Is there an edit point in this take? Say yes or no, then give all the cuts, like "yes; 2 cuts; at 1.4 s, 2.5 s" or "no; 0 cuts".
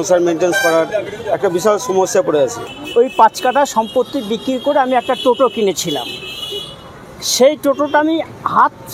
yes; 1 cut; at 2.7 s